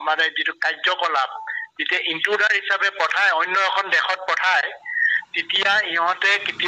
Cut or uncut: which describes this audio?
uncut